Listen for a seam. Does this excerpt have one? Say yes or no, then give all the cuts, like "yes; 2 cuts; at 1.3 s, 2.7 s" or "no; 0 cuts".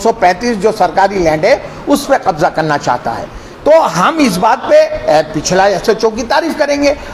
no; 0 cuts